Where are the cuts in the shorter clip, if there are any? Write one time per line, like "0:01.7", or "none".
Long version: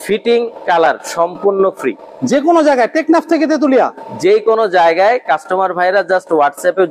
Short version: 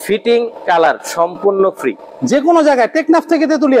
none